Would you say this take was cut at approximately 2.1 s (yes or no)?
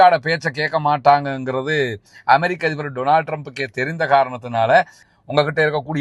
no